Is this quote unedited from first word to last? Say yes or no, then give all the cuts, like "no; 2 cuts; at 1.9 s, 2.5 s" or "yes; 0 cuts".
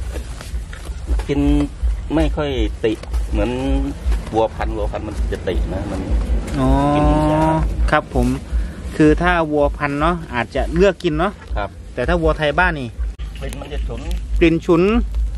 no; 1 cut; at 13.0 s